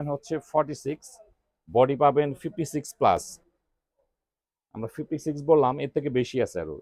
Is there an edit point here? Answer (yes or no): no